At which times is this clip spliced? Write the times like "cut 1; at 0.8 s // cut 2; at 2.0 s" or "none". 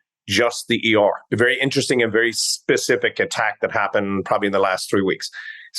cut 1; at 1.2 s